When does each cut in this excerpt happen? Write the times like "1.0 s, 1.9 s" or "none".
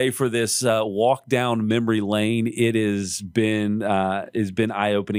none